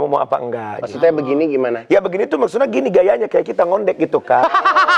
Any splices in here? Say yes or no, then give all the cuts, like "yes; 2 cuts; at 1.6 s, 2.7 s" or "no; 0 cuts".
no; 0 cuts